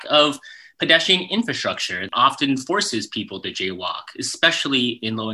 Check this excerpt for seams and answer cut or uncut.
cut